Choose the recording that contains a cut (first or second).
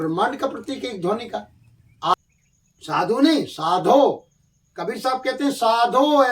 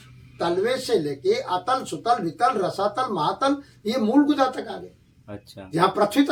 first